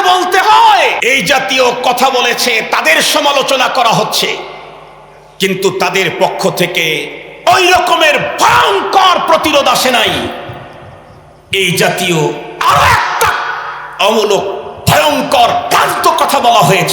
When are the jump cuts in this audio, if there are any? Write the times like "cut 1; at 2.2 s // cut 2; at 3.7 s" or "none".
cut 1; at 1.0 s